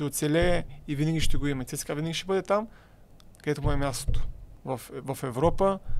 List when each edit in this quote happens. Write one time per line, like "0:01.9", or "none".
none